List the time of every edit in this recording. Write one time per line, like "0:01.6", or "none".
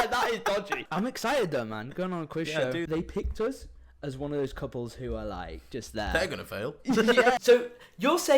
0:00.8
0:02.9
0:07.4